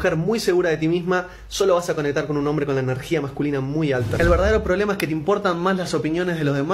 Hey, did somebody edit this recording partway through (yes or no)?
yes